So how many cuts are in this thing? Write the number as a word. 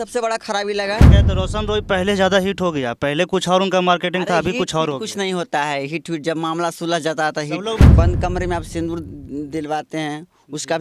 two